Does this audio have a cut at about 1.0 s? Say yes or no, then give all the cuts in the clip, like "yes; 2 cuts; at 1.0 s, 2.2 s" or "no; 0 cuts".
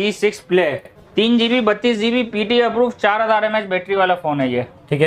yes; 1 cut; at 1.0 s